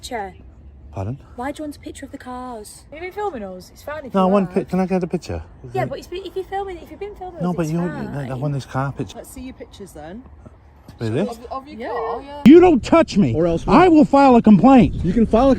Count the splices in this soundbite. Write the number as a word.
three